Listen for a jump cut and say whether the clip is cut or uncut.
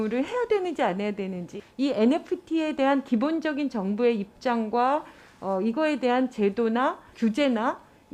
cut